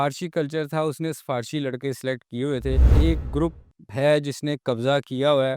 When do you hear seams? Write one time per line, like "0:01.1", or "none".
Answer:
0:03.0

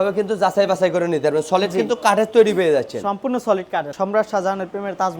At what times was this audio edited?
0:03.9

